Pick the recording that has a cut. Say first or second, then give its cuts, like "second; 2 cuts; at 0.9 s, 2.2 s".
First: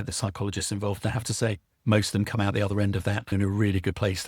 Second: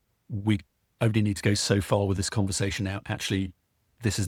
first; 1 cut; at 3.3 s